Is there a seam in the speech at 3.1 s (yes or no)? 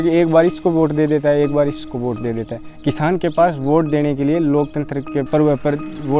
no